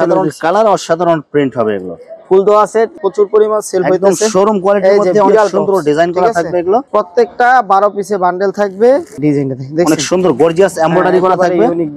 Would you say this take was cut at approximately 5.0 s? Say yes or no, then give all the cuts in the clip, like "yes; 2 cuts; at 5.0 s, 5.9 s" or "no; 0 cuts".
no; 3 cuts; at 3.0 s, 6.9 s, 9.1 s